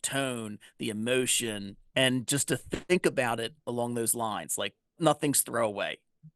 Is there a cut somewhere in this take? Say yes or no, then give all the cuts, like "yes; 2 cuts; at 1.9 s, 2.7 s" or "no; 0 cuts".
yes; 3 cuts; at 1.7 s, 3.5 s, 5.0 s